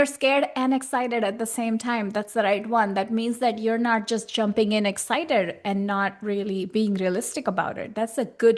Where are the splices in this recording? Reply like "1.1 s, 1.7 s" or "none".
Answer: none